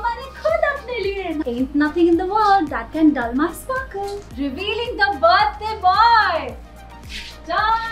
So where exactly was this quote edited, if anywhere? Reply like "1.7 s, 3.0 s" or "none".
1.4 s, 4.2 s